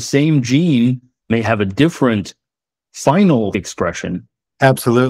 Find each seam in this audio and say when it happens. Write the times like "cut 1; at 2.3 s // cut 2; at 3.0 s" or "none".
cut 1; at 3.9 s